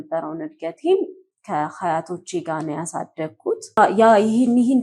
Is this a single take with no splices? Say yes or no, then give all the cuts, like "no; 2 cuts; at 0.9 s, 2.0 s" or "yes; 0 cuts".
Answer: no; 1 cut; at 3.8 s